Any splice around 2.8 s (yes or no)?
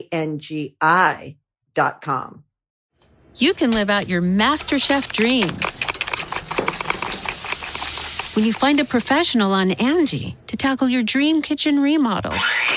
yes